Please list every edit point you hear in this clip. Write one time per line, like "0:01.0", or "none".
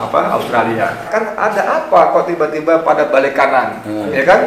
0:01.1